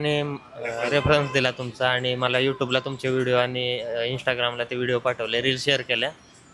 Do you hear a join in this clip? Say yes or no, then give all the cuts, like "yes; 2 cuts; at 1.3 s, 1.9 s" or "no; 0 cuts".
no; 0 cuts